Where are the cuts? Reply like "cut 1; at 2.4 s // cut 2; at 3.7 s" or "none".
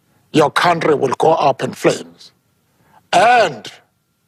none